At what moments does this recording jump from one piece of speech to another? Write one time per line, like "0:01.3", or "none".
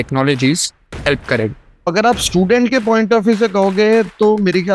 0:01.9